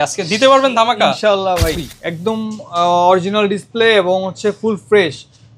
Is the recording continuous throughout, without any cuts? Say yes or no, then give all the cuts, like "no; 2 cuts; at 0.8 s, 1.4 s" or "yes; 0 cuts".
no; 1 cut; at 1.9 s